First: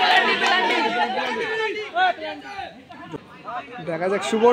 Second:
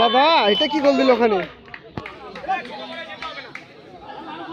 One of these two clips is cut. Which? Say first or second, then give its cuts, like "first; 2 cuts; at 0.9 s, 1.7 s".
first; 1 cut; at 3.0 s